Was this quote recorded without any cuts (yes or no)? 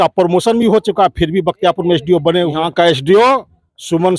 no